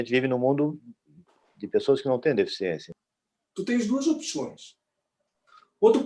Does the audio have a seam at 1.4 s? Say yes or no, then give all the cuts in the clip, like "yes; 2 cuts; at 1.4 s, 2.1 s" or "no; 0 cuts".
no; 1 cut; at 2.9 s